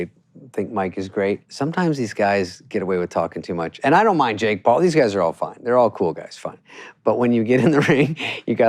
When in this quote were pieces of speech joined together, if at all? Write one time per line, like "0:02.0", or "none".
0:01.5
0:03.7